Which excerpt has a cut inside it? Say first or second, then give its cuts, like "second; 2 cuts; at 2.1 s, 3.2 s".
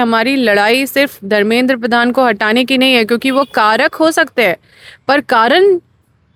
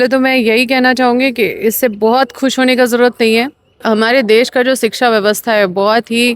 second; 1 cut; at 3.8 s